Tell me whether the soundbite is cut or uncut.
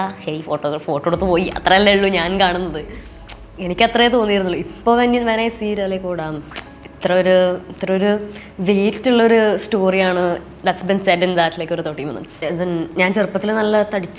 cut